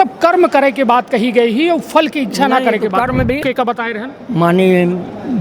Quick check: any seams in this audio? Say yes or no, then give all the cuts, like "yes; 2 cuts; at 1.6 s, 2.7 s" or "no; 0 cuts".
yes; 1 cut; at 3.4 s